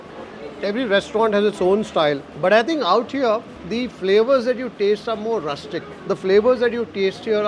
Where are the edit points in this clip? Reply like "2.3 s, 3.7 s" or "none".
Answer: 2.3 s, 3.6 s, 5.9 s